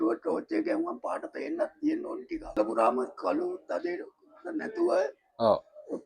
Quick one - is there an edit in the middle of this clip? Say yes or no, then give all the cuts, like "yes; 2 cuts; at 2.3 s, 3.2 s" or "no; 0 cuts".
yes; 1 cut; at 2.6 s